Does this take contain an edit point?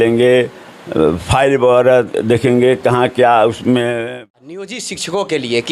yes; 1 cut; at 4.0 s

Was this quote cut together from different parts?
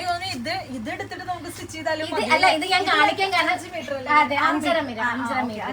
no; 0 cuts

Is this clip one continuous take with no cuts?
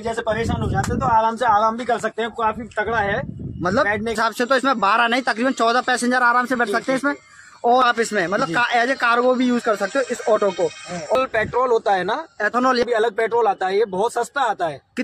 no; 3 cuts; at 4.1 s, 7.8 s, 11.1 s

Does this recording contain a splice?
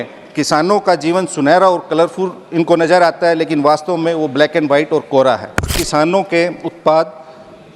yes; 1 cut; at 5.7 s

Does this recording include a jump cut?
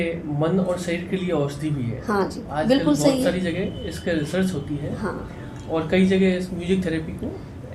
no; 0 cuts

